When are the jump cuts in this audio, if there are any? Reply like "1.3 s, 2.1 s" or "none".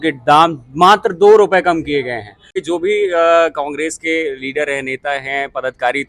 2.6 s